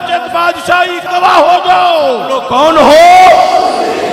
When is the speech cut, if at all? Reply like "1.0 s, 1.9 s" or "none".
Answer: 1.1 s, 2.4 s